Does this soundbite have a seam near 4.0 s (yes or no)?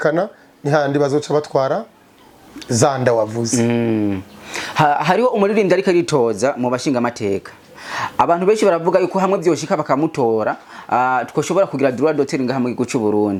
no